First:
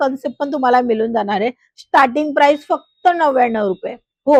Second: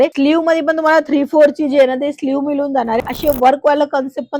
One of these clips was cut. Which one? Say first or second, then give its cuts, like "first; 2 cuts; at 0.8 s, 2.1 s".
second; 1 cut; at 3.0 s